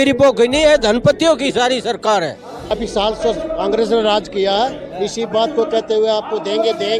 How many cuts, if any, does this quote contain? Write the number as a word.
one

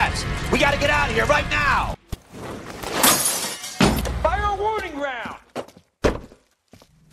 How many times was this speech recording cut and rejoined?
one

